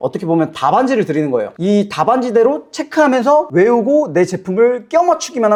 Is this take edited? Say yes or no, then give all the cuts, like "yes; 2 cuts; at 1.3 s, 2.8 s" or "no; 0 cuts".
no; 0 cuts